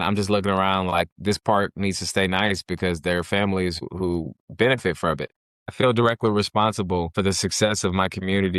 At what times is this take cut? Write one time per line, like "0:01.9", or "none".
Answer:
0:03.8
0:05.7
0:07.1